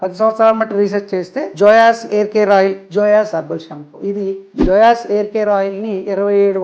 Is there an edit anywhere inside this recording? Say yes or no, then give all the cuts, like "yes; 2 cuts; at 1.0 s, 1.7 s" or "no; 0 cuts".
yes; 3 cuts; at 1.4 s, 2.8 s, 4.5 s